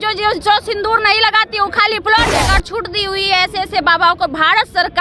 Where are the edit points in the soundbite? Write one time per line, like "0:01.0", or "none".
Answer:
0:02.3